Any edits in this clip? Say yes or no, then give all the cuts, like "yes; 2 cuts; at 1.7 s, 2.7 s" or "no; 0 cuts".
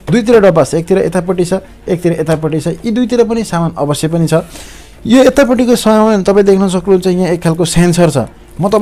no; 0 cuts